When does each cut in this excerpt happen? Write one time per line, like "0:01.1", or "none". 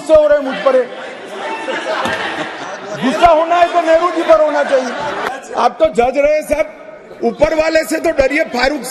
0:05.2

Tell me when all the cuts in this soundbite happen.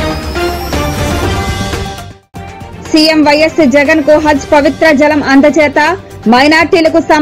0:02.7

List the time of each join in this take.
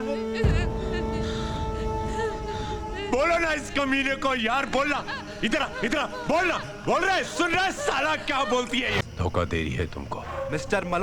0:09.0

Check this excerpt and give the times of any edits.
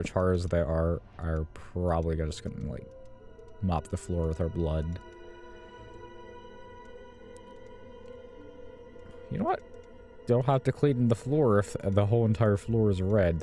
none

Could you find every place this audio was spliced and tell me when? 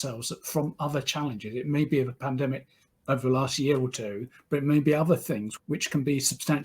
0:05.5

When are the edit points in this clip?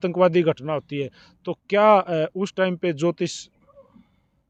none

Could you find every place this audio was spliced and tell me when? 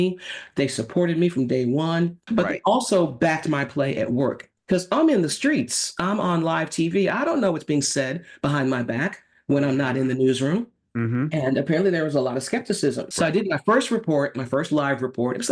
0:02.2
0:13.1

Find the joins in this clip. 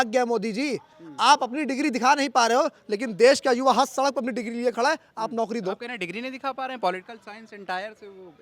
none

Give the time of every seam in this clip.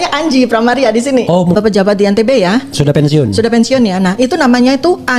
0:01.6

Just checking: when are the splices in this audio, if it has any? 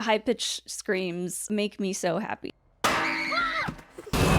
0:01.4
0:02.5

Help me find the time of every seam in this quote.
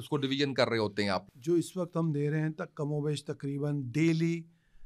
0:01.3

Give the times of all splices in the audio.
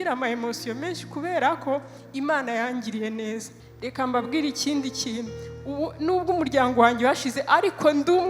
0:03.5

